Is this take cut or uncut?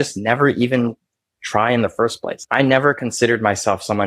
cut